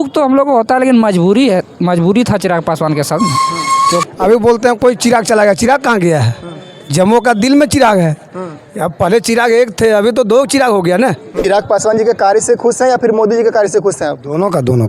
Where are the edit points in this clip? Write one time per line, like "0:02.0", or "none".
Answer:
0:04.0
0:11.3